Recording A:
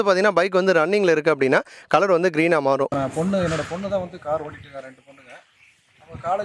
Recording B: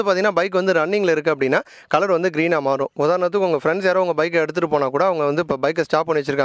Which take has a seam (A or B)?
A